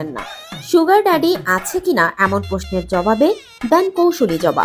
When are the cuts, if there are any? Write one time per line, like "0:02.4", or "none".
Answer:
none